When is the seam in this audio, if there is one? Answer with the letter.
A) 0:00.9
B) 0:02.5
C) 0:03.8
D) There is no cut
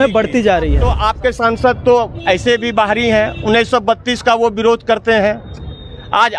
A